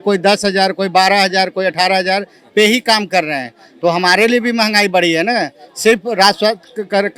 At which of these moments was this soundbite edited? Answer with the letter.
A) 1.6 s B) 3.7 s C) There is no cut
C